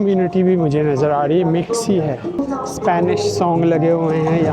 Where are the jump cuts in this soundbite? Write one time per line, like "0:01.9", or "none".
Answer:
0:02.4

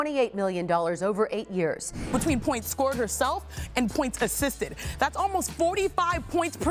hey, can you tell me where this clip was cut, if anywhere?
0:02.1

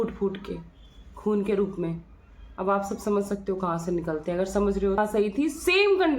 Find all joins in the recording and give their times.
0:05.0

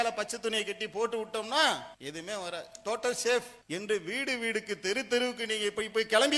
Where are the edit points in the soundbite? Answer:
0:02.0
0:03.6

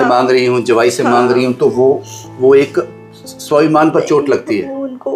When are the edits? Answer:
none

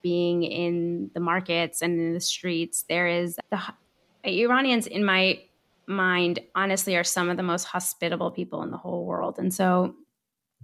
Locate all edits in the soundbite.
none

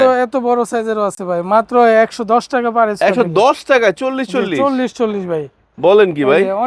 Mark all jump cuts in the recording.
none

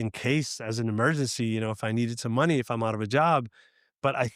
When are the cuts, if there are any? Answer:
none

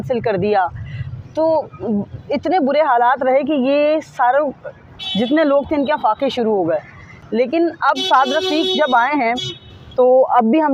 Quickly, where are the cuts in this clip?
none

